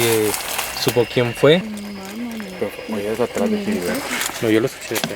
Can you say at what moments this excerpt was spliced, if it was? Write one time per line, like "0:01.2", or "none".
0:01.8